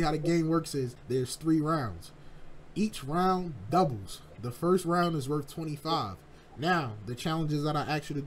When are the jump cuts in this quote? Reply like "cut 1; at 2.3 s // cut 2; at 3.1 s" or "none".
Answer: cut 1; at 1.0 s